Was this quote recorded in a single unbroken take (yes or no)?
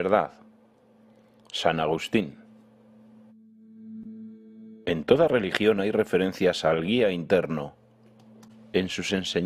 yes